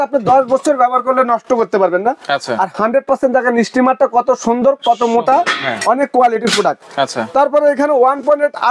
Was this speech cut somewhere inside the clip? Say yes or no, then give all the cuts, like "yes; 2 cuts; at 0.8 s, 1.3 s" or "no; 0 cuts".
no; 0 cuts